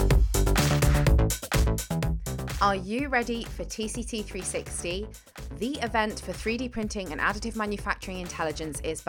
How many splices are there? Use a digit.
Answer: 1